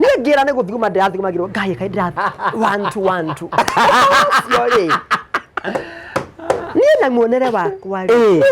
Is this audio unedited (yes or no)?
no